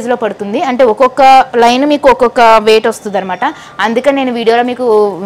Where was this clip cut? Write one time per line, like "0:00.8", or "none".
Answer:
none